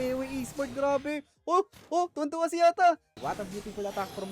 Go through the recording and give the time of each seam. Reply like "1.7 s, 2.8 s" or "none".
3.1 s